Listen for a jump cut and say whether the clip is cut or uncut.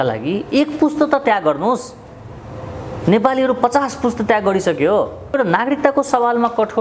cut